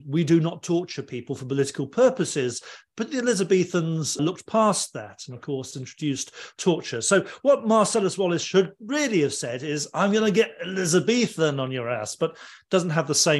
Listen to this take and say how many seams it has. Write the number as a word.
zero